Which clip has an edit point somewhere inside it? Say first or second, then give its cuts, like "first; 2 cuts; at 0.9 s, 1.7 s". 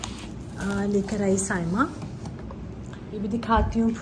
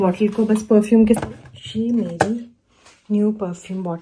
second; 1 cut; at 1.2 s